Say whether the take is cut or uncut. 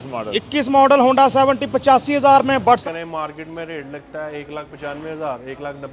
cut